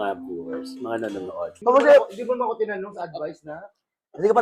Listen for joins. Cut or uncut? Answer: cut